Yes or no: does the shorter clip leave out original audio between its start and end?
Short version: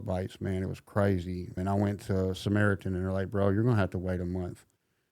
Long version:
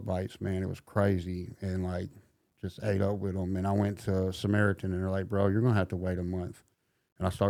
yes